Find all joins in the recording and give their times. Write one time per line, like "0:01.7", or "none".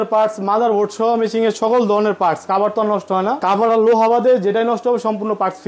0:03.4